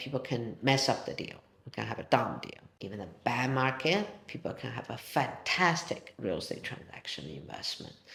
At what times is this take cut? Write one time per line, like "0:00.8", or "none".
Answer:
none